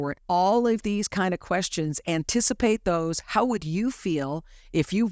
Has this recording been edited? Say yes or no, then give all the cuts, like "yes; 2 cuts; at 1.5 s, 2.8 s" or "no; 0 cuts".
no; 0 cuts